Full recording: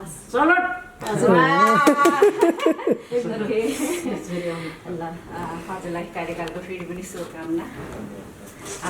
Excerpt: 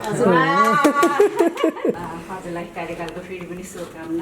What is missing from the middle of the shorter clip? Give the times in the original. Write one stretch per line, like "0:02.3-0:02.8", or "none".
0:03.0-0:05.4